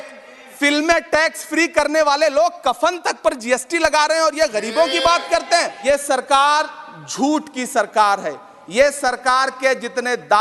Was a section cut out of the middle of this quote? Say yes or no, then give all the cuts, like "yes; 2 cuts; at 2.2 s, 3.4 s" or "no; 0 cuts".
yes; 1 cut; at 5.7 s